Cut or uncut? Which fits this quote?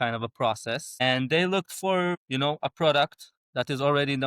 cut